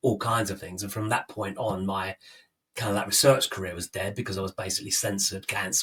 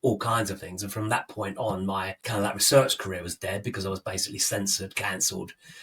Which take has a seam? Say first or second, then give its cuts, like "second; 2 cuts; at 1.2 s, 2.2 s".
second; 1 cut; at 2.2 s